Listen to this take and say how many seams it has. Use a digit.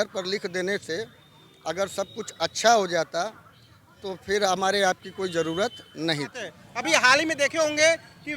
0